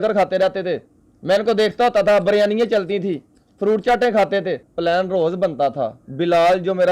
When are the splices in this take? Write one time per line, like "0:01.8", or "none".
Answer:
0:04.6